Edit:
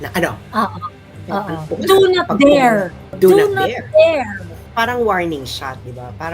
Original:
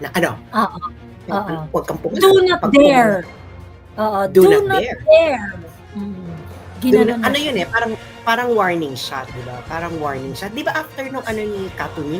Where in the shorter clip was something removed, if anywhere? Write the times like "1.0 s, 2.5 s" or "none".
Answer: 1.6 s, 3.1 s, 4.6 s